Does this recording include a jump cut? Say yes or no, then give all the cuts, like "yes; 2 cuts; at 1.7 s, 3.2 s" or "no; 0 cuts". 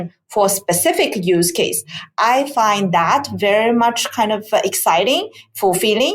no; 0 cuts